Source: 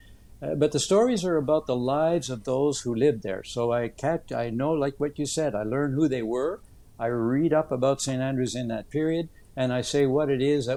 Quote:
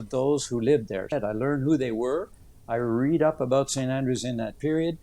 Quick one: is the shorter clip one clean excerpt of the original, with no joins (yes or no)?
no